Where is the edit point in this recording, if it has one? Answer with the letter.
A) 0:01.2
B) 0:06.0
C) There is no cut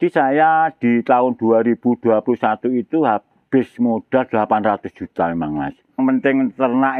B